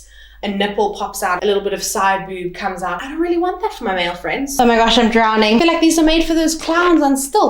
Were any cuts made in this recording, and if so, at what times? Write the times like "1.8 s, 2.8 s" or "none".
4.5 s